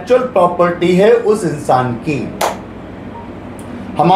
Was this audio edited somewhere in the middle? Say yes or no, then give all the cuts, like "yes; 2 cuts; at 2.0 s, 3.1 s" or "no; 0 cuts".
no; 0 cuts